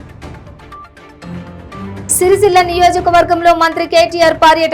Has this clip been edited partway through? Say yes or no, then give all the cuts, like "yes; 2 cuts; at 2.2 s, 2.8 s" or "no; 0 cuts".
yes; 1 cut; at 0.9 s